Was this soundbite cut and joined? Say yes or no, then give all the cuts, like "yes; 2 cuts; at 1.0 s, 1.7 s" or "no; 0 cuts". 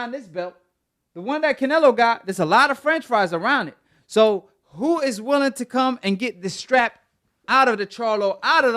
no; 0 cuts